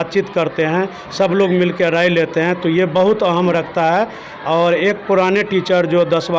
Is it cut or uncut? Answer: uncut